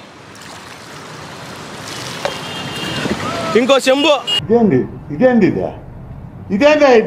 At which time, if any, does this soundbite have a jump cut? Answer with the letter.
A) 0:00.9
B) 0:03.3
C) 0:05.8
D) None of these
D